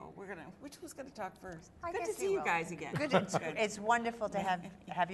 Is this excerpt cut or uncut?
cut